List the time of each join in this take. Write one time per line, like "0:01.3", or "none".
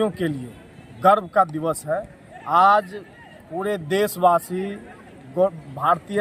none